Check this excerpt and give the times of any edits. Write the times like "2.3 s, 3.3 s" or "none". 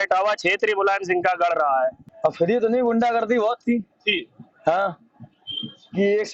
2.1 s